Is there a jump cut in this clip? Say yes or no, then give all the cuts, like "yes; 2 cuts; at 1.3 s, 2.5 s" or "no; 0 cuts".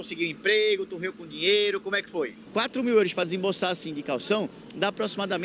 yes; 1 cut; at 2.4 s